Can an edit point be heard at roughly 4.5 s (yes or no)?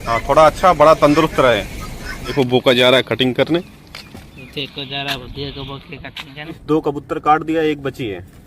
no